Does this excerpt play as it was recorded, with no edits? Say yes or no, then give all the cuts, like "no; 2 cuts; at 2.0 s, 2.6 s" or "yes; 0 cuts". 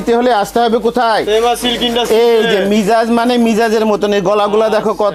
yes; 0 cuts